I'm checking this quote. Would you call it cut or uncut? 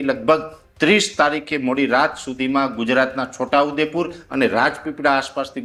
uncut